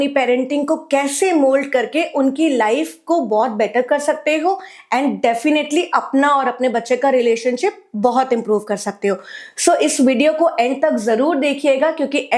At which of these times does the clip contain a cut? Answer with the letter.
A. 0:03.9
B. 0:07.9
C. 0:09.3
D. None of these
D